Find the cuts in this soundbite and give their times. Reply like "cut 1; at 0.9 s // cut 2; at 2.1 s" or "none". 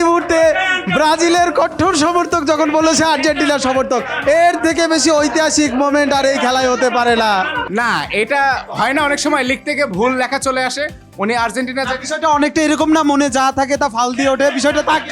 none